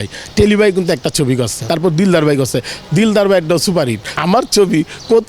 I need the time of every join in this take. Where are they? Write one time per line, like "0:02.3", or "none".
0:01.6
0:04.1